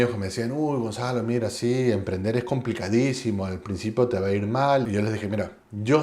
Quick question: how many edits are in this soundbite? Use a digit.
1